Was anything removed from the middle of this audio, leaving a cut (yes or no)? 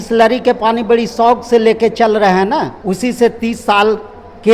yes